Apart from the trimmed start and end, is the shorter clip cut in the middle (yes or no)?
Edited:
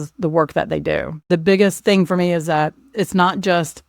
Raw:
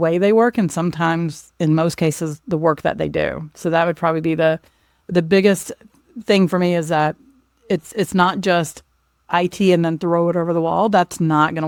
yes